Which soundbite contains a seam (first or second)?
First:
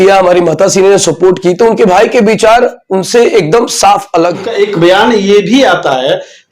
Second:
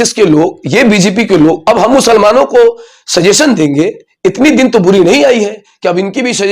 first